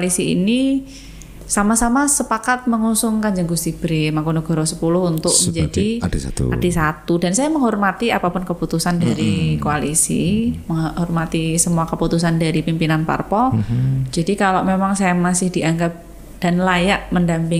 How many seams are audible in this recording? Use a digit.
0